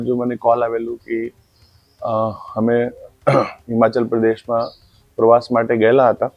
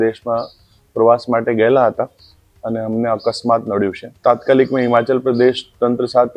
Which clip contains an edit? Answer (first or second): second